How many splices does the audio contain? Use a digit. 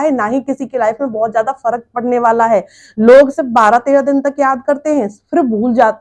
0